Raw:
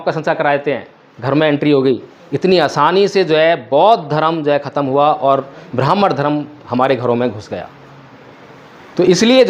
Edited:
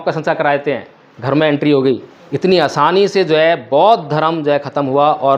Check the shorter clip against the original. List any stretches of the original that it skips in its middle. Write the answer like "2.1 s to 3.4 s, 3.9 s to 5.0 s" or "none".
none